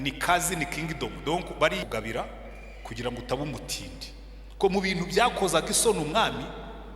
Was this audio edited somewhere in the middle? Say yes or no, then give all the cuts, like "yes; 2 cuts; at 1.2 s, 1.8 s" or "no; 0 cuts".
yes; 1 cut; at 1.8 s